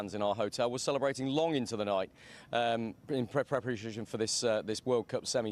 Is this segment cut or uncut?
cut